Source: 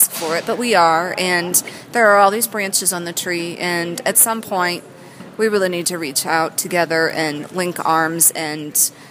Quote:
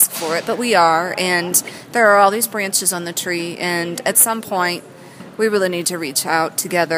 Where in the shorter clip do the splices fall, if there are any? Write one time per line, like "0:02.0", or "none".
none